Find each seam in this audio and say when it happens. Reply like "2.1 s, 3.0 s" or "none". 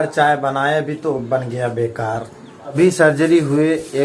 2.8 s